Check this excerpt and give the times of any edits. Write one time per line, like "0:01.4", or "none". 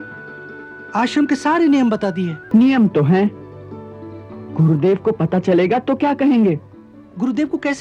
0:02.3